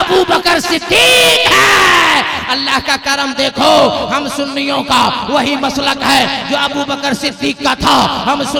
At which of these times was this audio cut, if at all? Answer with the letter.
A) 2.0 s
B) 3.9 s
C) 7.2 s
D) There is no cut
D